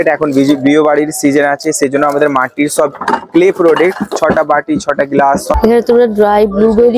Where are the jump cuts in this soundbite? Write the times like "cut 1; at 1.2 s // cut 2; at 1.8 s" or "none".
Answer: cut 1; at 5.6 s